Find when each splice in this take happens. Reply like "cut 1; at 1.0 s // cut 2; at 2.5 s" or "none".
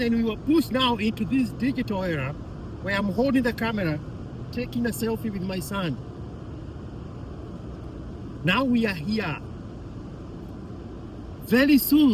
none